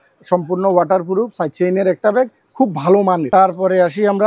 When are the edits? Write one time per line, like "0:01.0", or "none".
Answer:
none